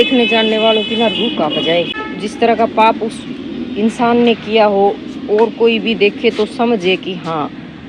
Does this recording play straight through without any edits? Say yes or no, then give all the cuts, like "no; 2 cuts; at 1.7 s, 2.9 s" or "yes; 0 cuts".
no; 1 cut; at 2.1 s